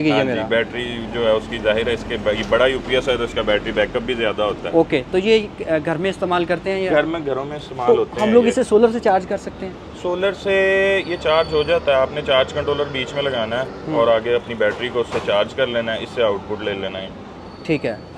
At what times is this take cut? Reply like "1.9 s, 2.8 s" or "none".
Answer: none